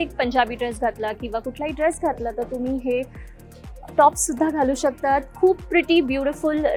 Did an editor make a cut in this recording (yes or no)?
no